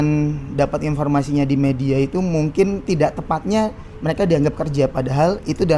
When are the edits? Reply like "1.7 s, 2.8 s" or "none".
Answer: none